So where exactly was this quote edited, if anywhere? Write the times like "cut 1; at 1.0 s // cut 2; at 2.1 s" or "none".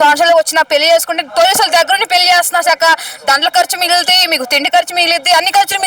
none

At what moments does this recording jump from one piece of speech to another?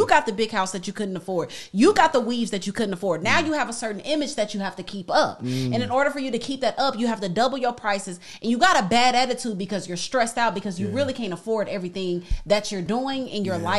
cut 1; at 12.8 s

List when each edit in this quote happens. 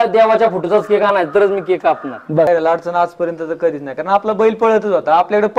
cut 1; at 2.5 s

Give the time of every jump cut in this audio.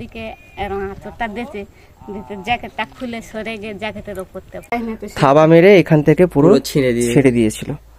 cut 1; at 4.8 s

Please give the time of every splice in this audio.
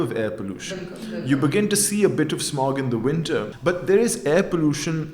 cut 1; at 3.5 s

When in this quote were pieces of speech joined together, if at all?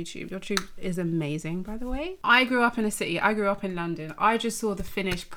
cut 1; at 2.1 s

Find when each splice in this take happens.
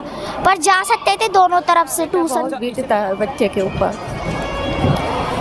cut 1; at 2.5 s

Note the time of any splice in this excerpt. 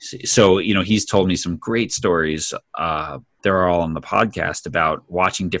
none

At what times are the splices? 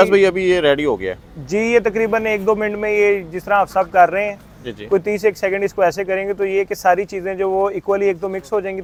none

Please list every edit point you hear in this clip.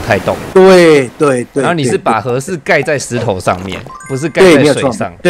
none

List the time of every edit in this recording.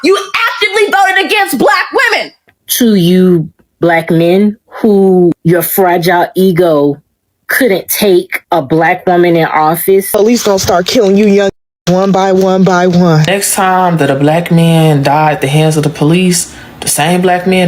cut 1; at 2.5 s // cut 2; at 10.1 s // cut 3; at 13.3 s

